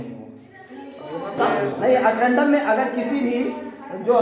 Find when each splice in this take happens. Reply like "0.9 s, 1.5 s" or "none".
1.4 s